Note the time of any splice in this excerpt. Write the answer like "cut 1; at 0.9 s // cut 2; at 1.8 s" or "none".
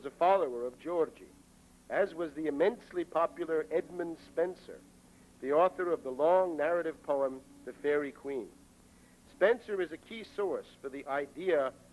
cut 1; at 7.5 s